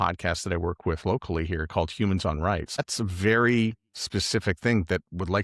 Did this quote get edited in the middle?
yes; 1 cut; at 2.8 s

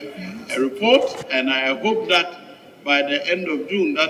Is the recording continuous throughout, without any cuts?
yes; 0 cuts

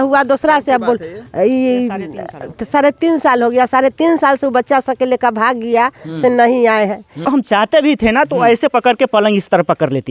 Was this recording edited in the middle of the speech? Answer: yes; 1 cut; at 7.3 s

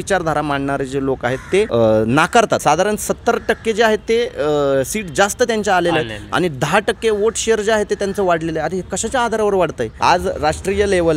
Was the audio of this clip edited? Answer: yes; 3 cuts; at 1.7 s, 2.6 s, 9.9 s

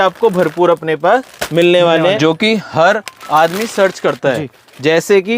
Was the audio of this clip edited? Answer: yes; 1 cut; at 2.2 s

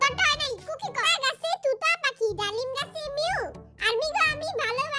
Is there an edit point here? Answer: yes; 1 cut; at 1.1 s

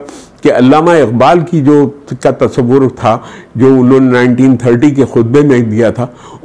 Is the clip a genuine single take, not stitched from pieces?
yes; 0 cuts

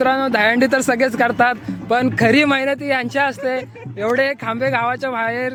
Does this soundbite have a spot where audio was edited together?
no; 0 cuts

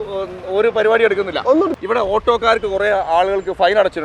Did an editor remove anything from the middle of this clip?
yes; 1 cut; at 1.8 s

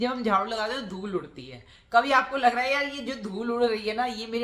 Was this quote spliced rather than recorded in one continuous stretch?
no; 0 cuts

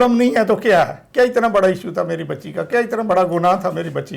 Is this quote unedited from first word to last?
no; 1 cut; at 1.0 s

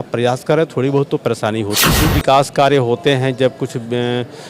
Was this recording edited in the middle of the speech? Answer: yes; 1 cut; at 2.0 s

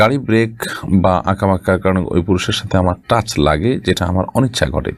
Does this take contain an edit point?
no; 0 cuts

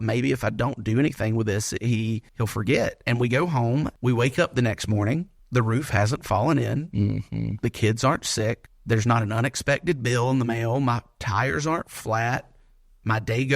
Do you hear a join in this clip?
yes; 4 cuts; at 2.3 s, 3.9 s, 5.4 s, 8.7 s

